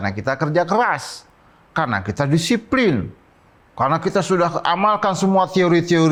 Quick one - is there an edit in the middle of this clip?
no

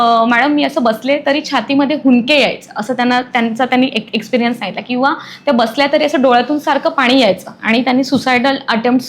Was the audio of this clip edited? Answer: no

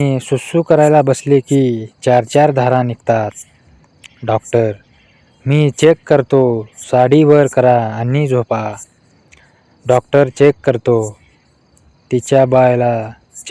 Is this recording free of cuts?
yes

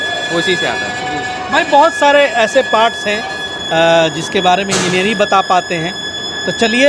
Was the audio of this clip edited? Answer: no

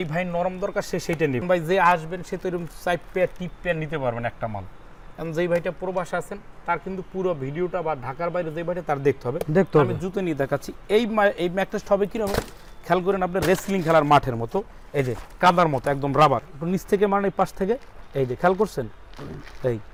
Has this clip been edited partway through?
no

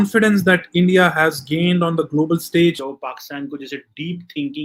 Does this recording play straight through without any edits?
no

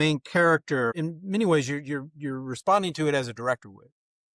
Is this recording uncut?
no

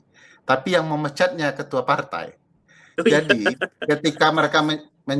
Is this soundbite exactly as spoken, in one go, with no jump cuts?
yes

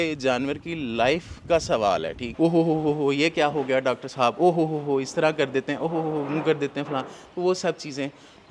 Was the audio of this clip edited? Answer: yes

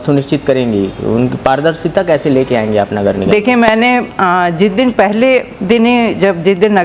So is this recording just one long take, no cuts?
yes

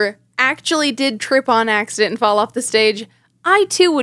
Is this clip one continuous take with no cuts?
yes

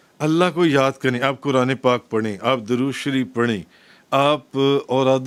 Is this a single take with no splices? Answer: yes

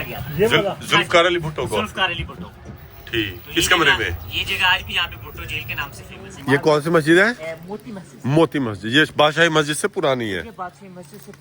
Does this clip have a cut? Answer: yes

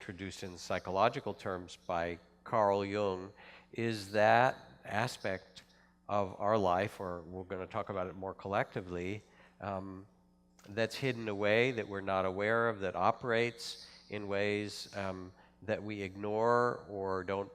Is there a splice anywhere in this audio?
yes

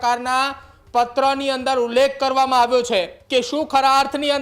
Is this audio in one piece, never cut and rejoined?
no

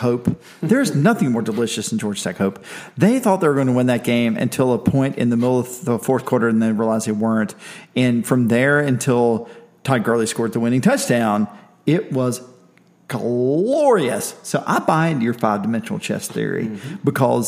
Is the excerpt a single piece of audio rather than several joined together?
yes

